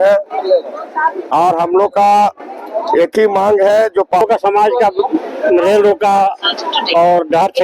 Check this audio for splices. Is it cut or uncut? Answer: cut